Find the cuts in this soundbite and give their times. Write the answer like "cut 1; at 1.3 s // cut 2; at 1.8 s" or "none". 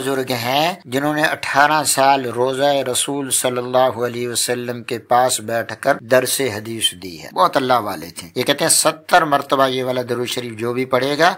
none